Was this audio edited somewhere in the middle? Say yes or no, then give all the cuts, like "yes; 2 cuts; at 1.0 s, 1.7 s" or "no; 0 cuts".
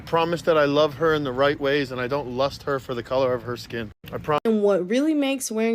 yes; 1 cut; at 4.4 s